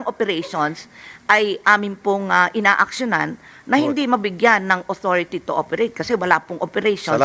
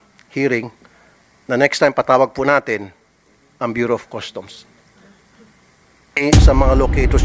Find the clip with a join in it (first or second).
second